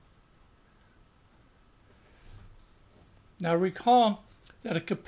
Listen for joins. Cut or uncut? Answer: cut